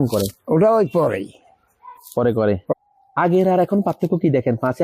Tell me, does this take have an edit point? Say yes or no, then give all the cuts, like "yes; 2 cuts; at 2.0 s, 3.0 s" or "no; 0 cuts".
yes; 1 cut; at 2.7 s